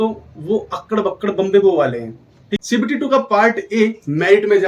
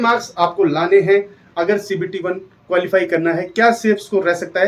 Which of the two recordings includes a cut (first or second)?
first